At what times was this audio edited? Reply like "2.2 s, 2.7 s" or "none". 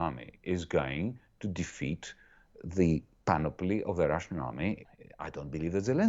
4.9 s